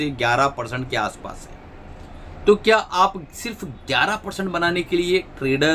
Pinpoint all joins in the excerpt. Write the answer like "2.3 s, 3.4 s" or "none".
none